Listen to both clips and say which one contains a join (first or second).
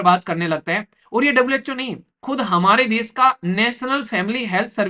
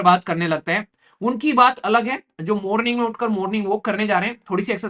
second